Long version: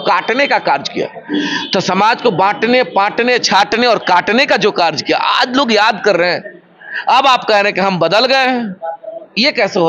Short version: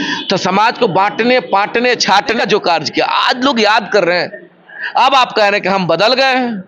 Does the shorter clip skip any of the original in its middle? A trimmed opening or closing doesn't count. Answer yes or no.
yes